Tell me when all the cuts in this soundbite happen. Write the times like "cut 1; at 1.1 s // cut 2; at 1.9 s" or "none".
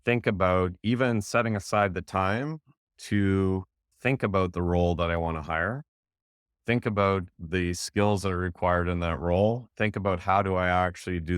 cut 1; at 3.9 s